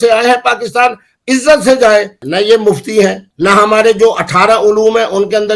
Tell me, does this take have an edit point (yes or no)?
yes